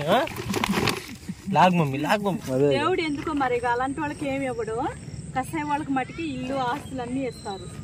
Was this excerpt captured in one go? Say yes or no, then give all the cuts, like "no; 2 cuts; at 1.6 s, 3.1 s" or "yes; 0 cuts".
no; 1 cut; at 2.4 s